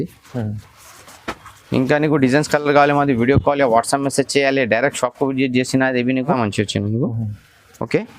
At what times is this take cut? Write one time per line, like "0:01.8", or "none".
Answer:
0:06.4